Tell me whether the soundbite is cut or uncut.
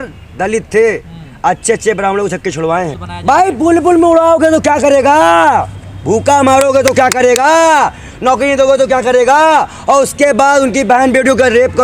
cut